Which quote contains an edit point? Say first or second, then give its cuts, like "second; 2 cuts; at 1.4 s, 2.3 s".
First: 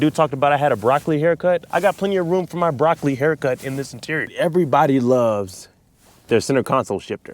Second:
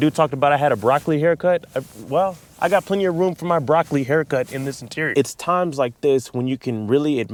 first; 2 cuts; at 1.6 s, 4.2 s